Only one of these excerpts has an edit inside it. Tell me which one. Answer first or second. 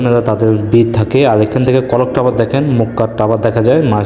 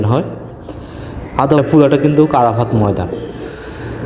second